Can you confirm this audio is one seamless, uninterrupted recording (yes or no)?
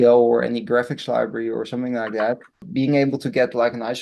no